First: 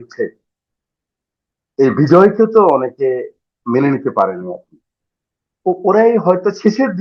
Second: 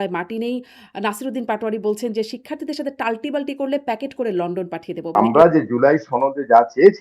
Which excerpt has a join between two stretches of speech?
second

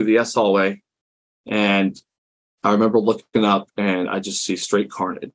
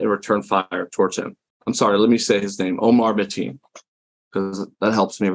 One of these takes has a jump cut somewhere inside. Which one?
second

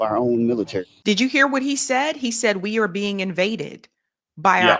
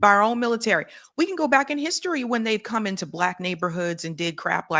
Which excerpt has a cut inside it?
first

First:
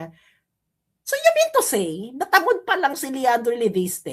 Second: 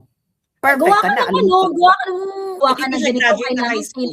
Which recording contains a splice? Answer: second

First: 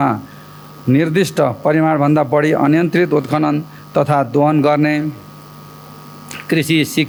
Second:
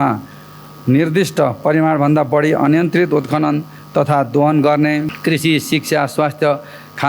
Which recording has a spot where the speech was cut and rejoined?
second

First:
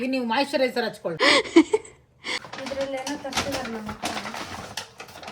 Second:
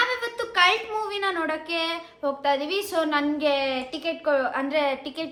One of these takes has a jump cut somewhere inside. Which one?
first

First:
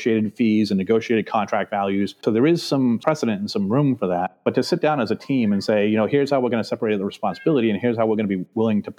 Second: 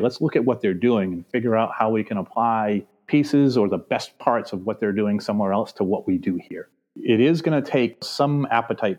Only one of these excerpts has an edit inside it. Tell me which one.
second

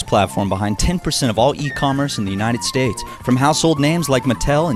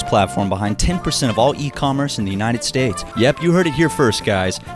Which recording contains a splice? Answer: second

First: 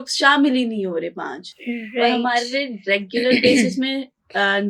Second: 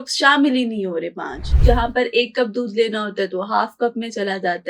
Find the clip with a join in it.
second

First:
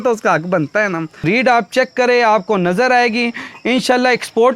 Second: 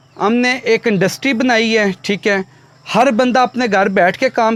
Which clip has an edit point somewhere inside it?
first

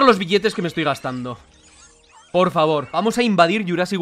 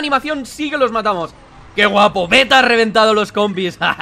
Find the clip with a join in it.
first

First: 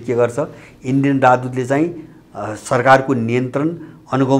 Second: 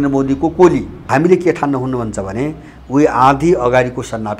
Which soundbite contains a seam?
second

